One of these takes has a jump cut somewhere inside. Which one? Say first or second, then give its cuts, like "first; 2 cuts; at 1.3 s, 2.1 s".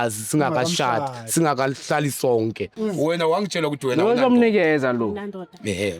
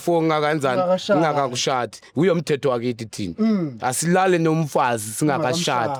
first; 1 cut; at 2.7 s